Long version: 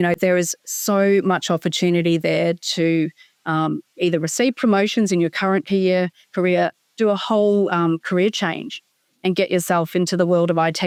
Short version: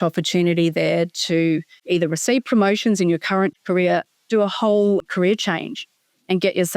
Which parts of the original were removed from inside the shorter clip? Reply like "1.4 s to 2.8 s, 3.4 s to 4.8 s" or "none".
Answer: 3.2 s to 3.9 s, 5.6 s to 6.2 s, 7.7 s to 8.0 s